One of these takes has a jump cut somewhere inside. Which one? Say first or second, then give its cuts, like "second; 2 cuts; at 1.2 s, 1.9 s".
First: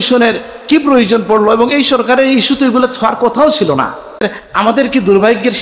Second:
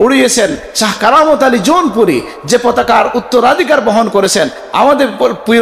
first; 1 cut; at 4.4 s